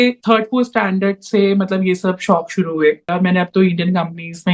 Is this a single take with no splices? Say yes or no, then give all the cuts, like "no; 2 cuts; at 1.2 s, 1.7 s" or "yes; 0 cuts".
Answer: no; 1 cut; at 3.1 s